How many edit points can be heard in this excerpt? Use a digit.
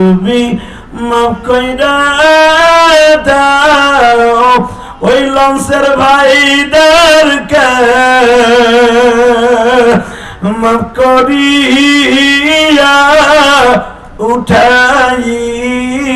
0